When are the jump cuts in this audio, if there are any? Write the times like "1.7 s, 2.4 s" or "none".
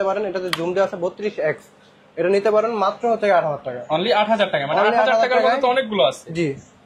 none